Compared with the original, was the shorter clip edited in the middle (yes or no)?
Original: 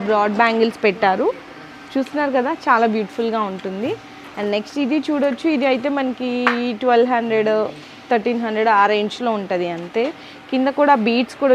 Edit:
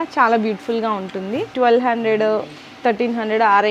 yes